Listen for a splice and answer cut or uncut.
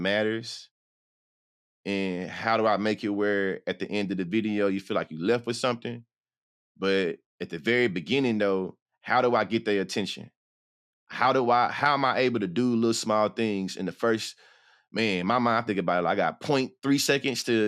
uncut